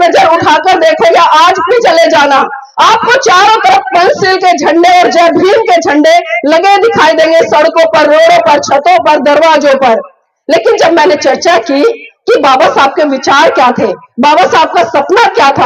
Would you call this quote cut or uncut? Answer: uncut